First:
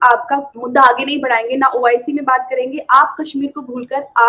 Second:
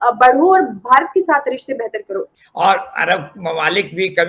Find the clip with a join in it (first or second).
second